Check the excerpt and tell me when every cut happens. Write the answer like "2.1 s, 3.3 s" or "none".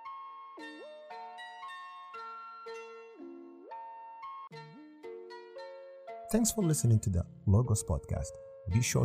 2.7 s, 4.5 s, 6.3 s